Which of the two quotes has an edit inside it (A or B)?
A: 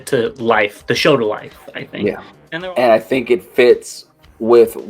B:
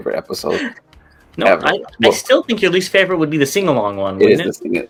A